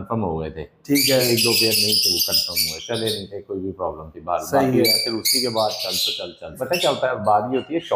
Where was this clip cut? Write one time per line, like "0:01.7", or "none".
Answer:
0:06.6